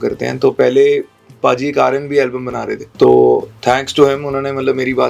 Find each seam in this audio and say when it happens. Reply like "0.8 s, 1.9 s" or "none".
2.8 s